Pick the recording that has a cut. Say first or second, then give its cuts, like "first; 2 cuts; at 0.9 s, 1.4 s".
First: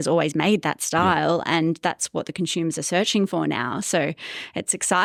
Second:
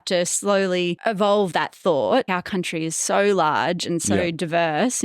second; 2 cuts; at 1.0 s, 2.3 s